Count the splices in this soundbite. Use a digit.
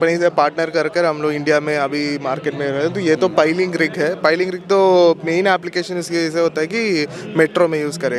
0